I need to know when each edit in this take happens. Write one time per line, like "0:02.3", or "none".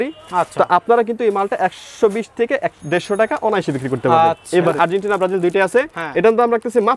0:04.5

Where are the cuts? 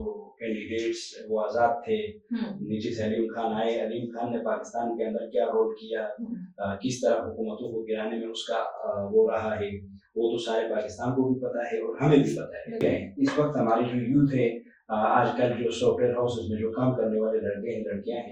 0:12.8

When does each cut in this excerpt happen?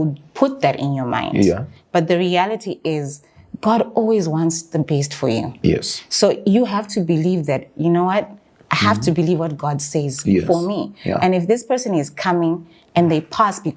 none

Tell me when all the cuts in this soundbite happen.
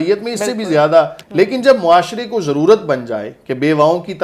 0:01.2

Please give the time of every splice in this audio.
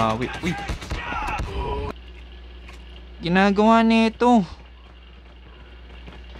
0:01.9

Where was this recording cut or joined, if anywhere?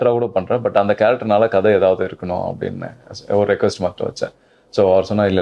none

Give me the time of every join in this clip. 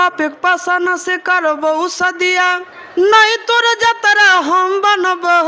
0:02.7

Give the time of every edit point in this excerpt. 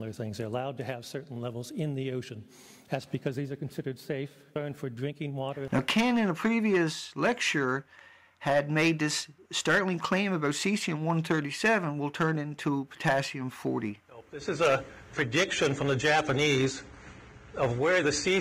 0:04.4
0:05.7

